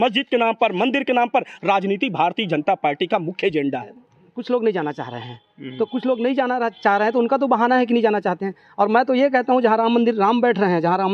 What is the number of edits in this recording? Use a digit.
1